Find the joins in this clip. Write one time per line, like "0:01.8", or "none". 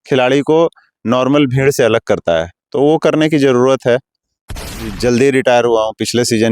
0:04.6